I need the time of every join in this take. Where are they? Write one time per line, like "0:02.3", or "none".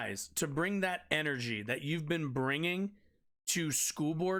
none